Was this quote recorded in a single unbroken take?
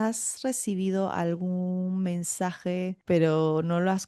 no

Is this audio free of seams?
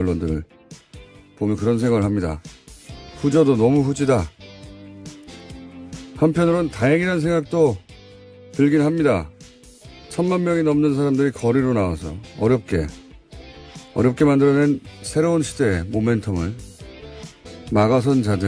no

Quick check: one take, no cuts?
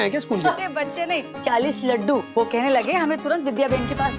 no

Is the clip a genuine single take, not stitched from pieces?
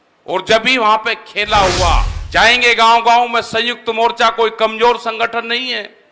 no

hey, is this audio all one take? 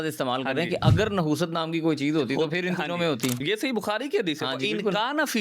no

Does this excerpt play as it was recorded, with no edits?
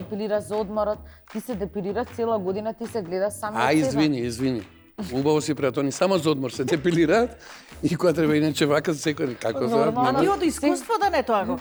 yes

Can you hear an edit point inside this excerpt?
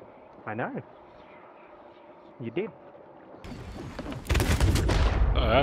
yes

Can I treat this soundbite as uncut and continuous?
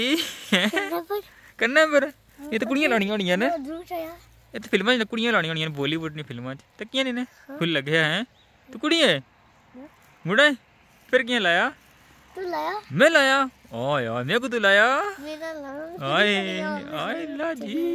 yes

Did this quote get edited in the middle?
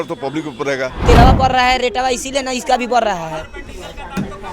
yes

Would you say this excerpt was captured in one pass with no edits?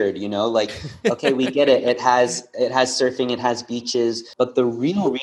no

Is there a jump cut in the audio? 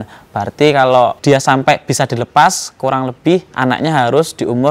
yes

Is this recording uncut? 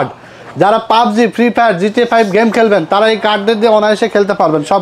yes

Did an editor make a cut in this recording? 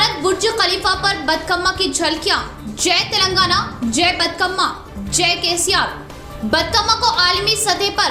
no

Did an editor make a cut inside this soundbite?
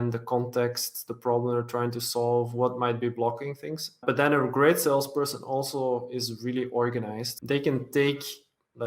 yes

